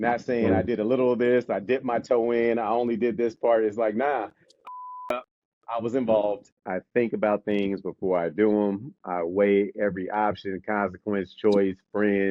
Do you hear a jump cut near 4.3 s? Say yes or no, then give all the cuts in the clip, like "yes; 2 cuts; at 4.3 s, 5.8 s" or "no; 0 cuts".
no; 1 cut; at 6.6 s